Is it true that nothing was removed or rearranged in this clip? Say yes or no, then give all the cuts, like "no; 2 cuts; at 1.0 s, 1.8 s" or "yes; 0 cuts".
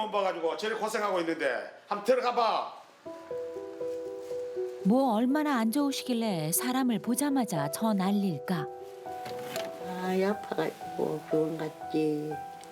no; 1 cut; at 9.8 s